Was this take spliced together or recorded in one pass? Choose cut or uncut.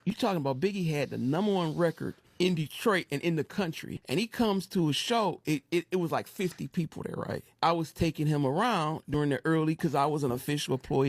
cut